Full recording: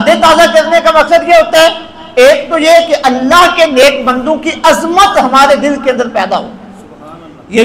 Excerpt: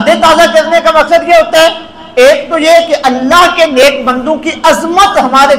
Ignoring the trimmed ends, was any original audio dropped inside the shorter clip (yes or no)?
no